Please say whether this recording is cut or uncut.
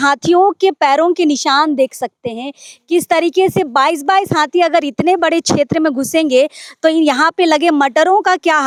uncut